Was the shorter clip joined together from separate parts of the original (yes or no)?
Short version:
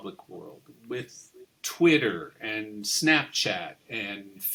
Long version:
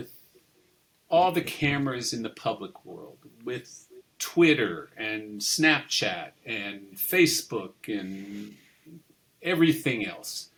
no